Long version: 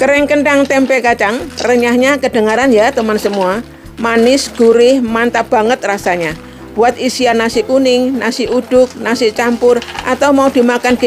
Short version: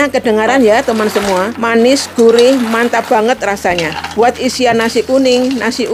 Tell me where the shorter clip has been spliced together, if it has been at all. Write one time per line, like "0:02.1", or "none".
0:01.6
0:04.0